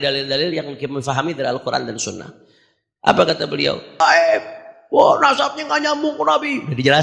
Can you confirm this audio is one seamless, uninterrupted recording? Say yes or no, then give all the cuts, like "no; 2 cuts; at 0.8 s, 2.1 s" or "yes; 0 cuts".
no; 1 cut; at 4.0 s